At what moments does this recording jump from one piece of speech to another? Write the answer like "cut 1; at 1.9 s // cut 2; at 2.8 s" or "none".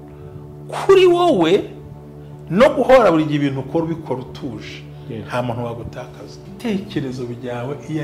cut 1; at 6.5 s